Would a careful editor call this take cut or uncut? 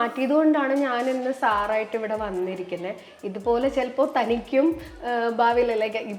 uncut